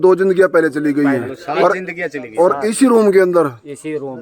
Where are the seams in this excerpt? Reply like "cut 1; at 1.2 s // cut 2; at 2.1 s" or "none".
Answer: none